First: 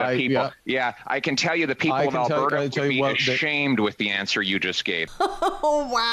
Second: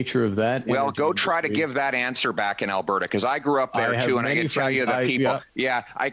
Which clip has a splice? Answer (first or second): first